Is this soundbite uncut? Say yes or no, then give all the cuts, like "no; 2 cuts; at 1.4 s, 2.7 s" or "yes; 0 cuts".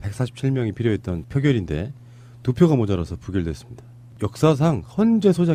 yes; 0 cuts